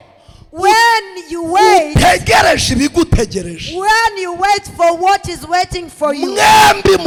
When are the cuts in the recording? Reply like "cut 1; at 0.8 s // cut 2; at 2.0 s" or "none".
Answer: none